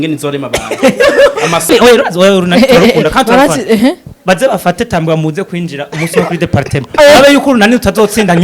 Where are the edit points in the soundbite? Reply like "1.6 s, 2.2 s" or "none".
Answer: 1.7 s